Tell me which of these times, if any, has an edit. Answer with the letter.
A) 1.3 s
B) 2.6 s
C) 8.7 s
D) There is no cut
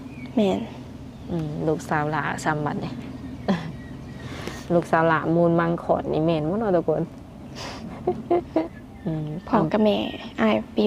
C